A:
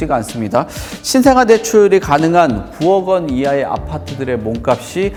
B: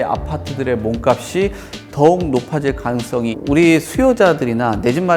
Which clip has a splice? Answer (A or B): B